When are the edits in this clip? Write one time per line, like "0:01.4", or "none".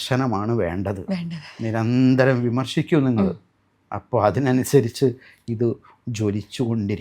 none